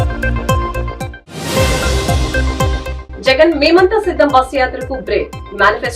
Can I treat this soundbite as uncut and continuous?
no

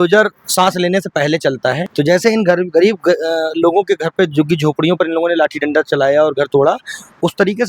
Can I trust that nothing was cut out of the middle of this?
yes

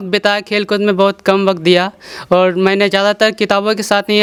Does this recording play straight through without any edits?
yes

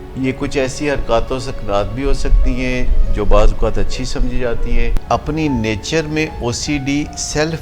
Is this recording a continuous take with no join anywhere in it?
no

